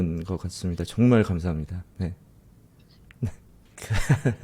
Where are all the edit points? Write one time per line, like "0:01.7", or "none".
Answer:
none